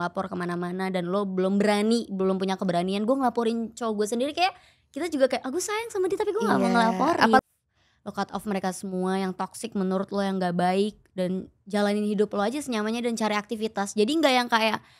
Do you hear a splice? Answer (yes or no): yes